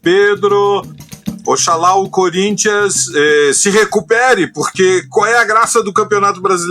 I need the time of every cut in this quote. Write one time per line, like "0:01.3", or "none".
0:01.3

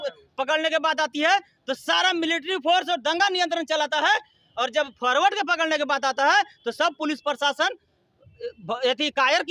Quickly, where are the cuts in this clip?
none

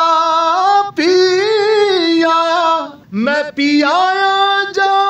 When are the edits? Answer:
0:03.0

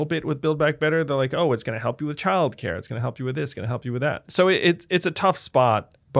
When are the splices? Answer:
0:04.2

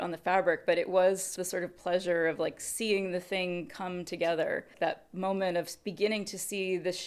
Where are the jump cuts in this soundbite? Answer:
0:01.3
0:04.7

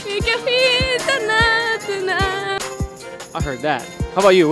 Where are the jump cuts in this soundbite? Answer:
none

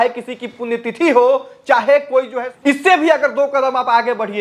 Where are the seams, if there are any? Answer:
0:02.4

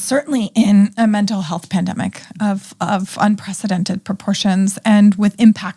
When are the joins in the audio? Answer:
0:00.9

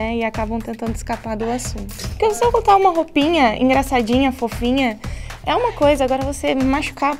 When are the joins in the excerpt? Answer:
0:02.0

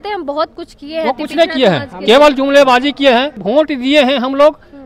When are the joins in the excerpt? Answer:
0:03.4

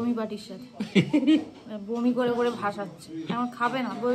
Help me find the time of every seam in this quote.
none

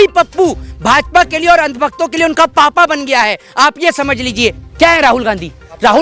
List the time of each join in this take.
0:04.6

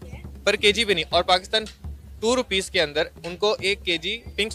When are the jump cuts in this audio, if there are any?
none

